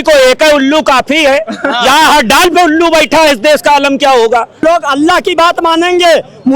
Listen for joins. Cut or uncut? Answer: cut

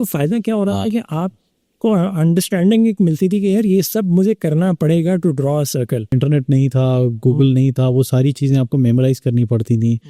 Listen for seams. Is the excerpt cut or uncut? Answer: cut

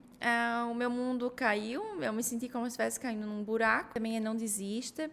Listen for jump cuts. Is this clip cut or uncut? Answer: cut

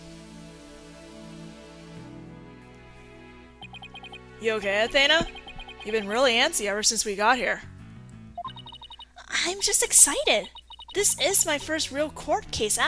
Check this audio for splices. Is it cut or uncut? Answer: cut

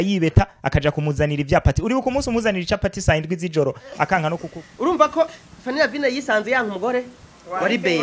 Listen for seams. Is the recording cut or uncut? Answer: cut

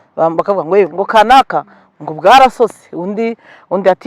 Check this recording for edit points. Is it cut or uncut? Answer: cut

